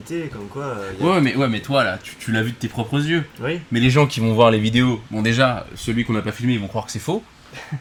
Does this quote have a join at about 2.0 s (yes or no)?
no